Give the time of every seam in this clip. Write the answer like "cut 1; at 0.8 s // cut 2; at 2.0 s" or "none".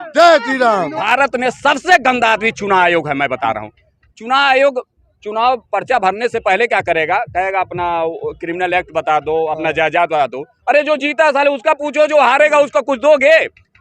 cut 1; at 1.0 s